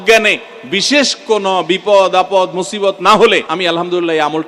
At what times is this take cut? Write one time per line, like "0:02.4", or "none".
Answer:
0:03.5